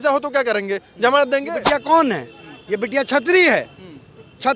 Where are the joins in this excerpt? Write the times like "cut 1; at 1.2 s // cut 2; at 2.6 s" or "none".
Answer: cut 1; at 1.4 s